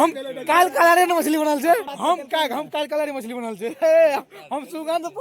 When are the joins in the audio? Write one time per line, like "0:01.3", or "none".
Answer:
none